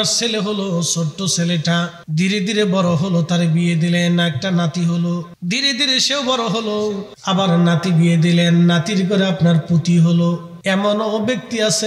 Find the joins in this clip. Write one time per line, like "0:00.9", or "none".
0:02.0
0:05.3
0:07.1
0:10.5